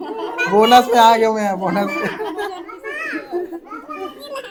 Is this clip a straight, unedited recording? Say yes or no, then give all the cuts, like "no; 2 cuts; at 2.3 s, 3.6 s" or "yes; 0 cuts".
yes; 0 cuts